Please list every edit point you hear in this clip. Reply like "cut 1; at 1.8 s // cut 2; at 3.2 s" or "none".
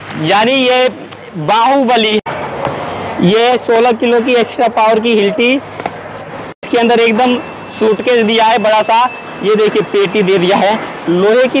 cut 1; at 2.2 s // cut 2; at 6.7 s